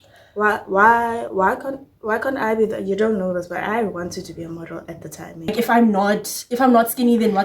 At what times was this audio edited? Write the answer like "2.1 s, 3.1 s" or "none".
5.5 s